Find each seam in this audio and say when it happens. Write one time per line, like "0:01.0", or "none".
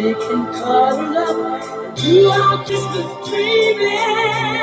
0:02.7